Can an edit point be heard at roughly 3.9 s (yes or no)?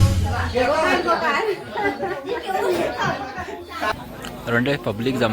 yes